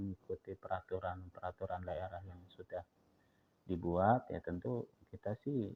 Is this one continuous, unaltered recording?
yes; 0 cuts

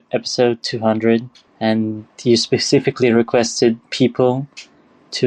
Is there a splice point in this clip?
yes; 1 cut; at 1.7 s

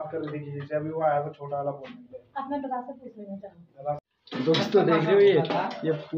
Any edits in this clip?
yes; 1 cut; at 4.1 s

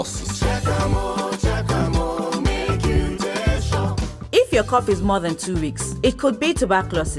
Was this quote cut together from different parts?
yes; 1 cut; at 4.1 s

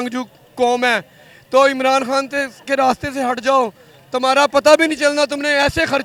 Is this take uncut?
yes; 0 cuts

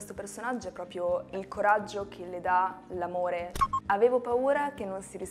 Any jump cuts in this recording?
yes; 2 cuts; at 1.3 s, 3.6 s

